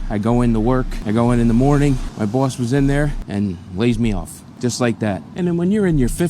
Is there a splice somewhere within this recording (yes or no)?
yes